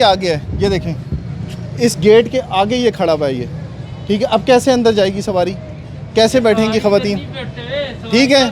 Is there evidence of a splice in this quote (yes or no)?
no